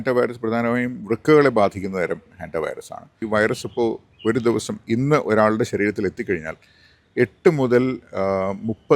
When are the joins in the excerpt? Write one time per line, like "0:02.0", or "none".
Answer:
0:03.2